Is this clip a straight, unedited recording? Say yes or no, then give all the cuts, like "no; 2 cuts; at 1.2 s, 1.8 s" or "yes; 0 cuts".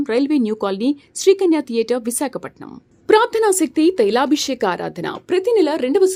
yes; 0 cuts